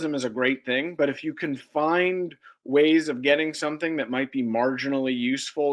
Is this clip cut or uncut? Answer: uncut